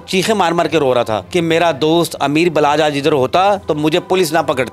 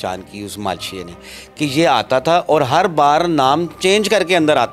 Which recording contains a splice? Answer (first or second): first